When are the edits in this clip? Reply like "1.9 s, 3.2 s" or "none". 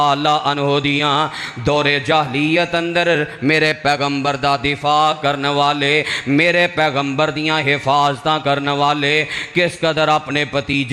none